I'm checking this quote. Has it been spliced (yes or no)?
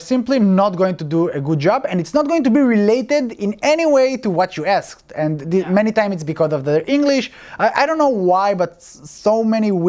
no